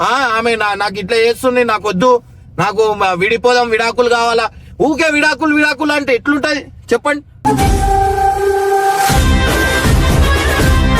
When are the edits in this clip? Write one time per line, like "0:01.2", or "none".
none